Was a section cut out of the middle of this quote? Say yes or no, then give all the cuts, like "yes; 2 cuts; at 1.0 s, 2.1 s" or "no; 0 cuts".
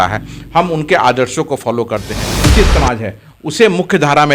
yes; 1 cut; at 2.4 s